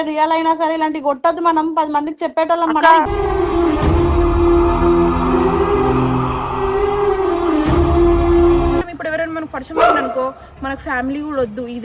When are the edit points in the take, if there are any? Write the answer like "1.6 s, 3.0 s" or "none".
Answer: 8.9 s